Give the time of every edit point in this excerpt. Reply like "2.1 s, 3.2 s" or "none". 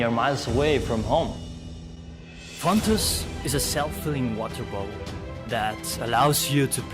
2.0 s, 5.2 s